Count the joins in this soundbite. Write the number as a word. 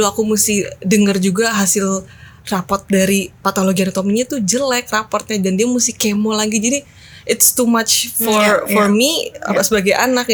zero